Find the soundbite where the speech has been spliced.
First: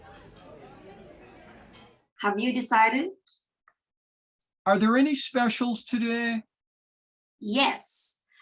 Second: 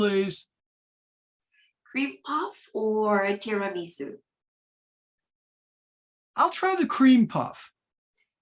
first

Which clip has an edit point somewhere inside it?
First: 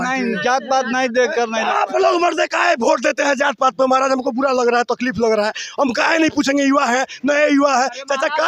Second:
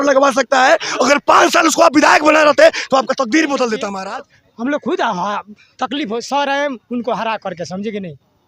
second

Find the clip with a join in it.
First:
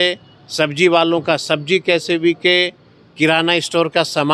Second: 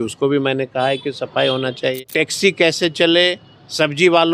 second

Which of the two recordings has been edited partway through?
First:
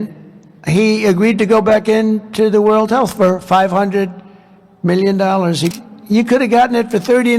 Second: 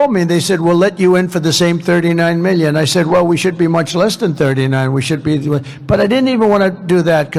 first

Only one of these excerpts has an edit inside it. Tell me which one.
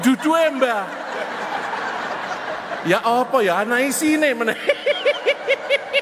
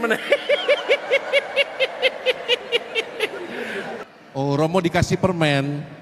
second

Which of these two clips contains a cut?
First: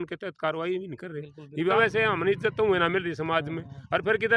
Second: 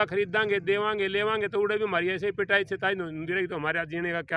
first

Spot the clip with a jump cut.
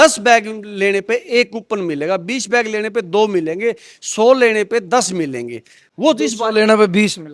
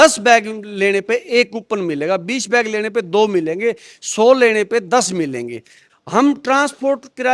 second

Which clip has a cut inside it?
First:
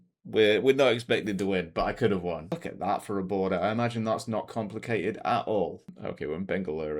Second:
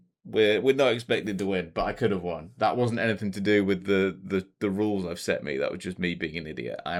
first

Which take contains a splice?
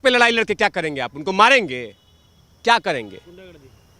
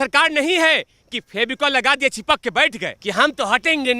second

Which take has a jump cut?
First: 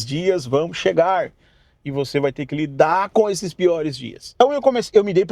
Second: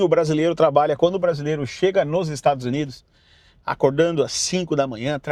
first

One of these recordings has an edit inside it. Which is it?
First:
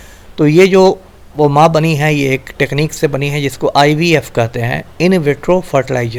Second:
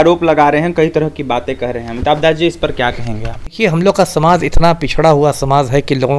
second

